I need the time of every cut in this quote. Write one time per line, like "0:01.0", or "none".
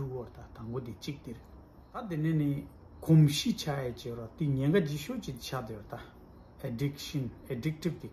0:02.1